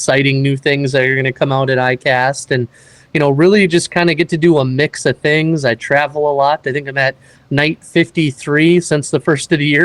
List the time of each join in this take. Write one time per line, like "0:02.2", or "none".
none